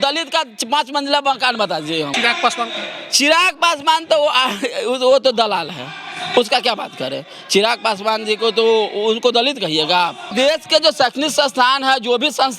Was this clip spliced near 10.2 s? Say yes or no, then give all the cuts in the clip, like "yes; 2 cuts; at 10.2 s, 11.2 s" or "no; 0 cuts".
yes; 2 cuts; at 2.1 s, 10.2 s